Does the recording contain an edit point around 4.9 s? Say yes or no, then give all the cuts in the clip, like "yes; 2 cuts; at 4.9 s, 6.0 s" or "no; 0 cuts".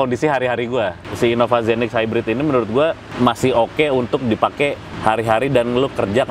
yes; 3 cuts; at 1.0 s, 3.1 s, 4.9 s